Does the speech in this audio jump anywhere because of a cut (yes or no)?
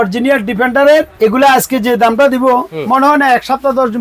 yes